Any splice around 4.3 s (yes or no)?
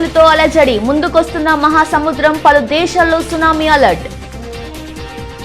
yes